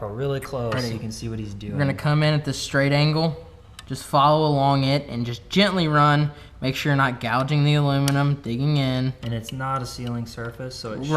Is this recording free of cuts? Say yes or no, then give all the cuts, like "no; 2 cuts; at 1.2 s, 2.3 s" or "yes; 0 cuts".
yes; 0 cuts